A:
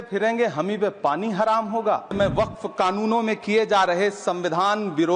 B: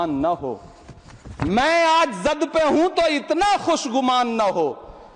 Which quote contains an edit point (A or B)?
A